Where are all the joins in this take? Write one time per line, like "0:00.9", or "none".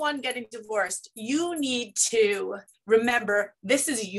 none